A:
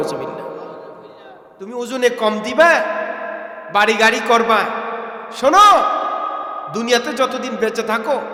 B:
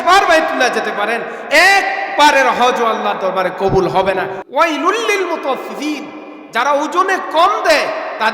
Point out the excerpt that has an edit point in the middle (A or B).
B